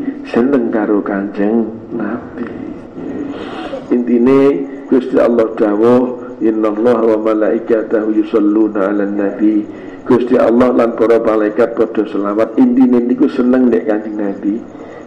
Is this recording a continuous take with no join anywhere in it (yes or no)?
no